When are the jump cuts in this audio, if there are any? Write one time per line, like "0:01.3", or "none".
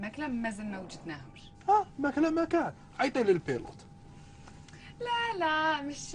none